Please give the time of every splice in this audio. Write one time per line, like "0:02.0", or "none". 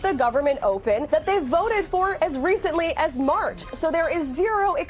0:03.6